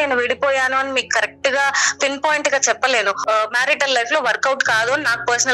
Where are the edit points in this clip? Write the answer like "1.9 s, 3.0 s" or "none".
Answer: 3.2 s